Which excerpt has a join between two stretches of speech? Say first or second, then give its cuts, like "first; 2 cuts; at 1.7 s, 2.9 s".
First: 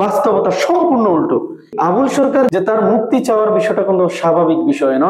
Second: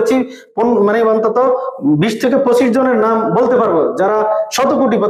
first; 2 cuts; at 1.7 s, 2.5 s